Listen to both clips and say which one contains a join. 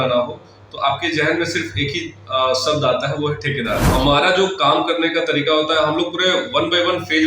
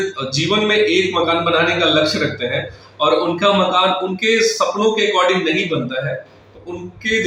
first; 1 cut; at 3.8 s

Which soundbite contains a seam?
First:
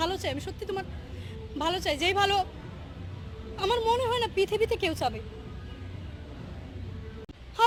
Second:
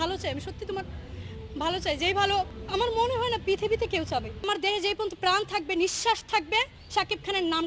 second; 2 cuts; at 2.6 s, 4.4 s

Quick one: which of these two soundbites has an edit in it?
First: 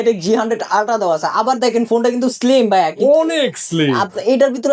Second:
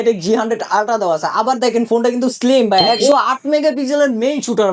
second; 1 cut; at 3.1 s

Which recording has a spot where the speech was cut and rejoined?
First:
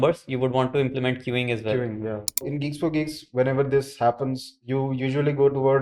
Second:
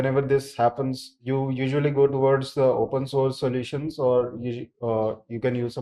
first; 1 cut; at 2.4 s

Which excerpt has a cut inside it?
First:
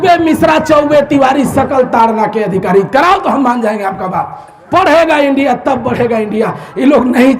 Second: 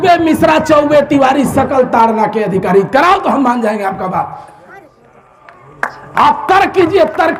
first; 1 cut; at 4.5 s

